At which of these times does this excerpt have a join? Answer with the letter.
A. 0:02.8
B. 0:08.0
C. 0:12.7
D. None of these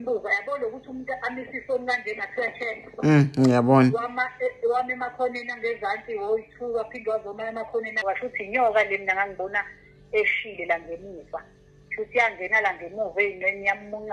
B